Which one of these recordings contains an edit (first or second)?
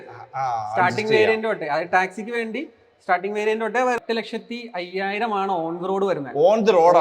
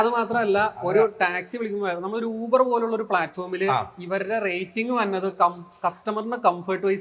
first